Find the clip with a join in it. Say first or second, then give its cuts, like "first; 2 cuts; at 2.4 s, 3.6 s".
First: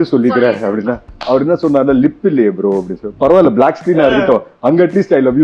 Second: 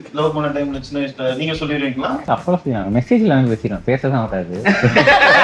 second; 1 cut; at 2.2 s